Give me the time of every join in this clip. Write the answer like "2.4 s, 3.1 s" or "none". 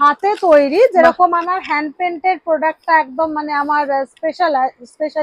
none